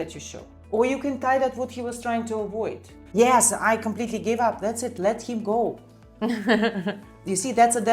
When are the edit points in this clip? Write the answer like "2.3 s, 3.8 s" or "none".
3.2 s